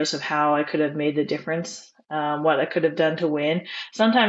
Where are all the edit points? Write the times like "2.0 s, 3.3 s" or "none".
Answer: none